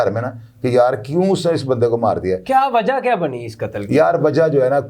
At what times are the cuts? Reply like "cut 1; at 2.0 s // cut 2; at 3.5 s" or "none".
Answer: none